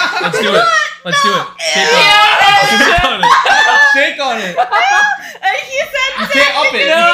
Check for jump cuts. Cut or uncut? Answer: uncut